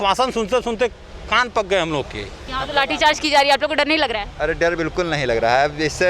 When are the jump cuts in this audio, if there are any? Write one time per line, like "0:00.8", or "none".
0:02.4